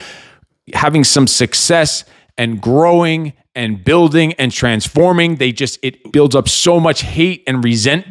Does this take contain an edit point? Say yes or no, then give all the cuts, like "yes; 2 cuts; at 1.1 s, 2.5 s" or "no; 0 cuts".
yes; 1 cut; at 6.0 s